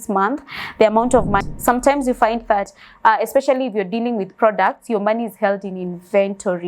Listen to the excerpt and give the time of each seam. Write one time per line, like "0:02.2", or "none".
0:01.5